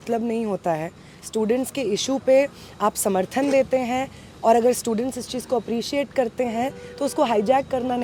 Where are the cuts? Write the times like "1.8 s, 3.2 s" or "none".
none